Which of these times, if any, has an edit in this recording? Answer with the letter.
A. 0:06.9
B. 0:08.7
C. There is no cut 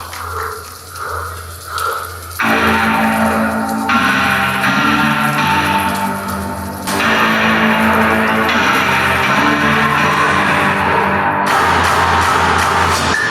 A